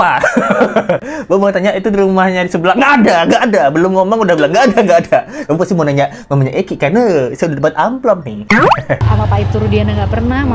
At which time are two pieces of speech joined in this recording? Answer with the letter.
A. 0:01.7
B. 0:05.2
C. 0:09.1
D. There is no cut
C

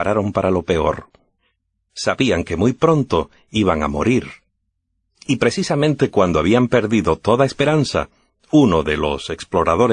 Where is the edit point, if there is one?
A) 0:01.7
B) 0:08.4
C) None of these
A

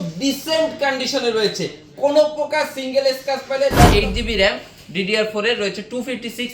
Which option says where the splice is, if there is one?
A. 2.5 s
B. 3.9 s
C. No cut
B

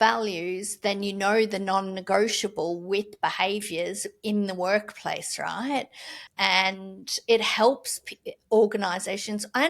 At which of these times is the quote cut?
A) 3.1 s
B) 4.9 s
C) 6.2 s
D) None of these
C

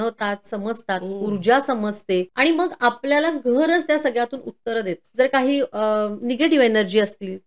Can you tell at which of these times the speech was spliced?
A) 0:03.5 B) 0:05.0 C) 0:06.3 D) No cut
B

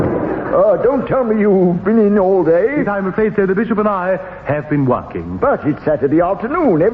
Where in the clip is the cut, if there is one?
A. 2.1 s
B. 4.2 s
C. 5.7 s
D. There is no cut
A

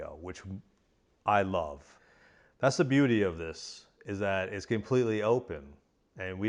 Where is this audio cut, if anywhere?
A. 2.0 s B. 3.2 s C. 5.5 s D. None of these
D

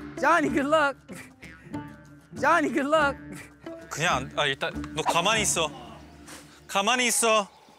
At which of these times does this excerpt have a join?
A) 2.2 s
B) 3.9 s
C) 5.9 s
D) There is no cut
B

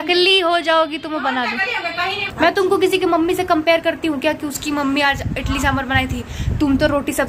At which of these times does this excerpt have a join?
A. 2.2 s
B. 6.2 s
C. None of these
A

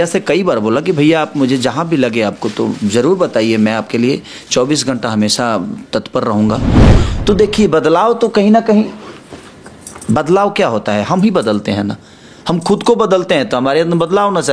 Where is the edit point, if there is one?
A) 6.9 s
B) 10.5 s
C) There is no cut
A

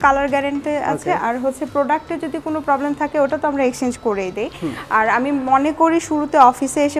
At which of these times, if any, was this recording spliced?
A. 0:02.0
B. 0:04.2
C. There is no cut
C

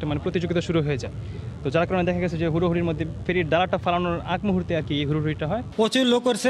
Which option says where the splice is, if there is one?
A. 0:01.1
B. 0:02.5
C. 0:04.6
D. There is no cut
D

